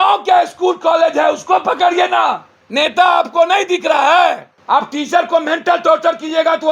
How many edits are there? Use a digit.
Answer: 2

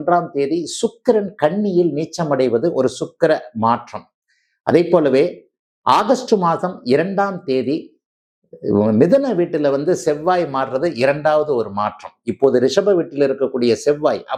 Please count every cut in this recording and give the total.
0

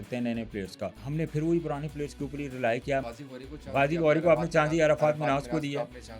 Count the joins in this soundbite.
2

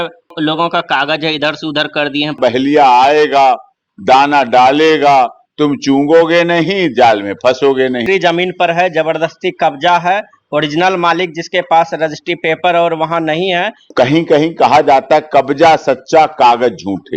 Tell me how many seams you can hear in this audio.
3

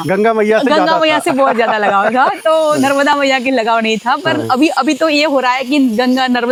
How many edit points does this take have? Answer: 0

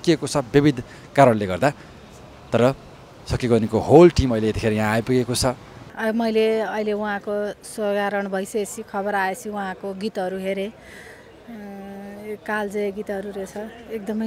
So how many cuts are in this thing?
1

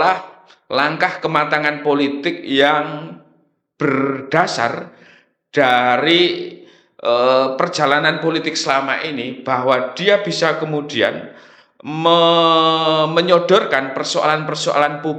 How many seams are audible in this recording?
0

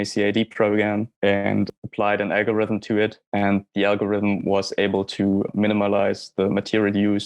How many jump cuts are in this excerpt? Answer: 2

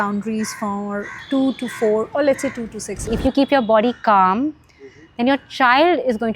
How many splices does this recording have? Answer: 1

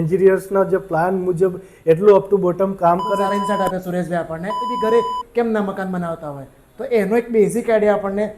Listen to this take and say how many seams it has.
2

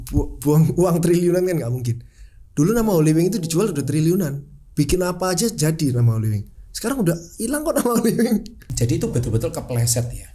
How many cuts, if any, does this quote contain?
1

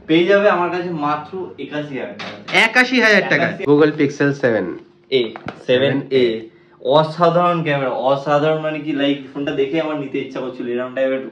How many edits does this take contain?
1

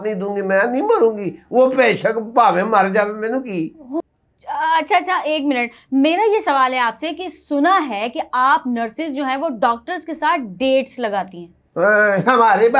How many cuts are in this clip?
1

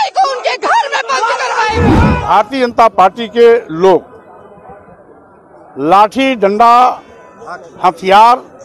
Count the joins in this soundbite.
1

